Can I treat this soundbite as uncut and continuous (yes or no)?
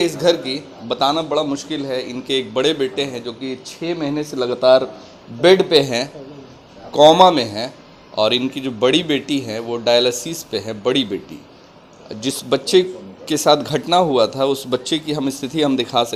yes